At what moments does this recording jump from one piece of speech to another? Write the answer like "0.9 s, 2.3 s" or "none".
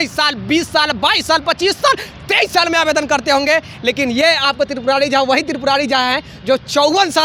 none